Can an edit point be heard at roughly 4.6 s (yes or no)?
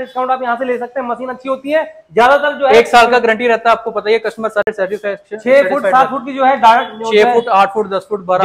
no